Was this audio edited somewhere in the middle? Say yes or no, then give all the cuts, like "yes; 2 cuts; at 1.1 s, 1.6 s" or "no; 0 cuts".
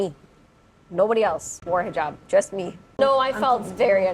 yes; 1 cut; at 2.9 s